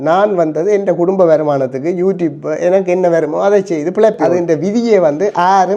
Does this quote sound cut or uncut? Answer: cut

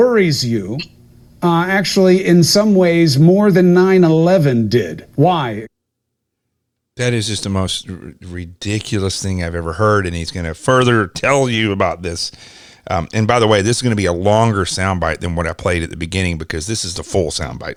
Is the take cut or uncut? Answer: uncut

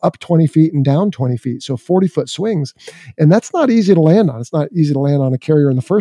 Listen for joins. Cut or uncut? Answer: uncut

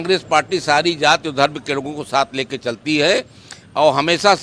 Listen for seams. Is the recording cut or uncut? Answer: uncut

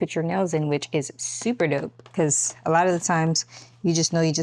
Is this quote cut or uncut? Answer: uncut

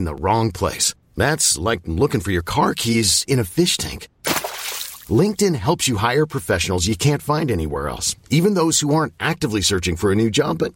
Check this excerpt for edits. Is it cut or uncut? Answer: uncut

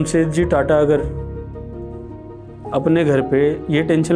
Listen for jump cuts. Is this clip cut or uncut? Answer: uncut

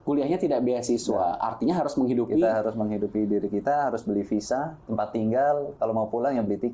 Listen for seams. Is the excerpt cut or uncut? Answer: cut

